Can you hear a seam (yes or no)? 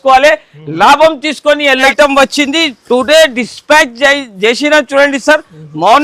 yes